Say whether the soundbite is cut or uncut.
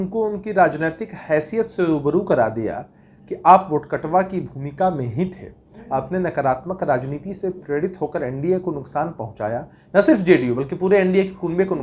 uncut